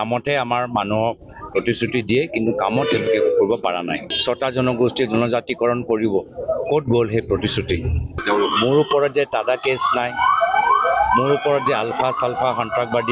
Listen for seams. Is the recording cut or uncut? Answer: cut